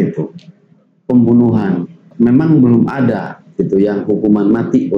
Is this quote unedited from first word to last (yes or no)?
no